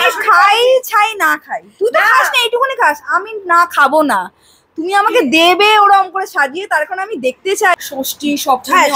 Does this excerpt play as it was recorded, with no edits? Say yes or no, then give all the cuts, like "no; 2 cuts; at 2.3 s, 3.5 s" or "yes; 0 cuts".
no; 1 cut; at 7.7 s